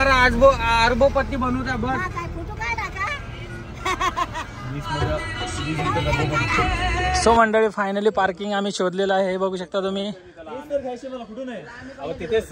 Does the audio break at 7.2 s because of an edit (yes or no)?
yes